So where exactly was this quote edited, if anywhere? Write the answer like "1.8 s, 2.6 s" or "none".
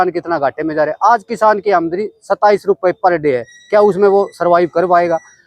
none